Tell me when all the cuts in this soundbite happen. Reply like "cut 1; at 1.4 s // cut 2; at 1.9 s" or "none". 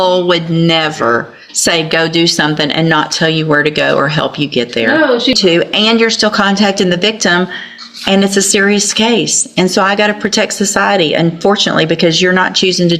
cut 1; at 5.4 s